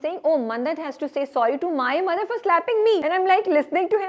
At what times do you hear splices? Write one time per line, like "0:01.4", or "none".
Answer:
0:03.0